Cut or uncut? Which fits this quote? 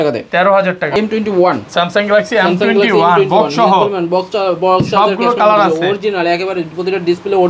cut